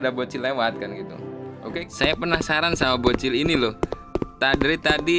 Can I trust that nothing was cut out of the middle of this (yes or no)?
no